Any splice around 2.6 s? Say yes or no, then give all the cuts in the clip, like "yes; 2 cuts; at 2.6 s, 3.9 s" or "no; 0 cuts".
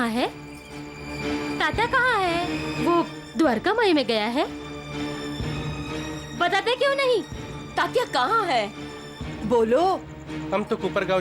yes; 1 cut; at 2.6 s